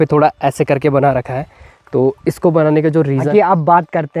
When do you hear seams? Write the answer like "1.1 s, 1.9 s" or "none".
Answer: 3.3 s